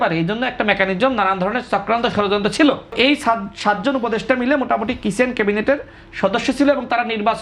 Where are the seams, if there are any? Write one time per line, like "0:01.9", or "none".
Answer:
0:02.9